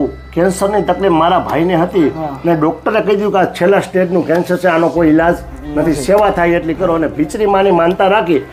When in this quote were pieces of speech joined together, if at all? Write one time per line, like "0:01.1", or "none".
none